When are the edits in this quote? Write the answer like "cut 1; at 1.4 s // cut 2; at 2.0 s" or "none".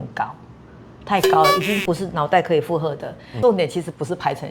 cut 1; at 3.2 s